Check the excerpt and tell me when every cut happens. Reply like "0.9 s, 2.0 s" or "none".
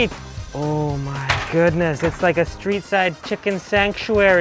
none